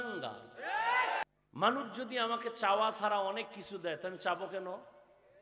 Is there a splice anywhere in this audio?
yes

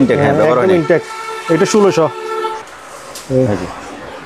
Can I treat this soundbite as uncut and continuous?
no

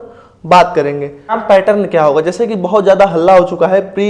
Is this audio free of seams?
no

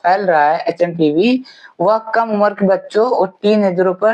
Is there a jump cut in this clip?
no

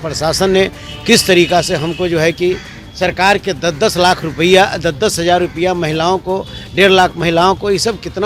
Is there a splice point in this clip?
no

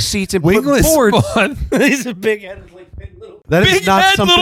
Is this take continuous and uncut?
no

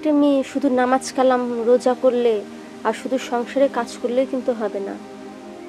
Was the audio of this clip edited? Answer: no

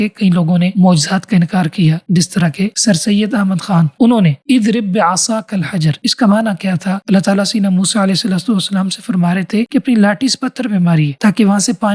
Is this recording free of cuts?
yes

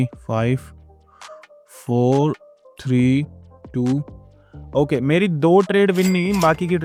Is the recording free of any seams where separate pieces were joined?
yes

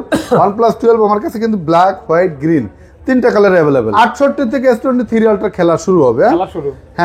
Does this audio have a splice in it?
yes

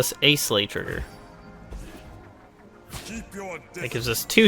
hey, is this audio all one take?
yes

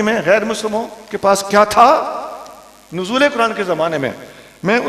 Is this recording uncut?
yes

